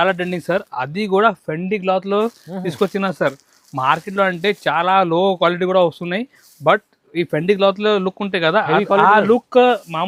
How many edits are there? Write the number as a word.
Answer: zero